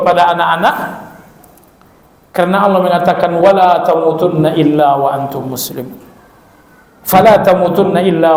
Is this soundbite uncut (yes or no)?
yes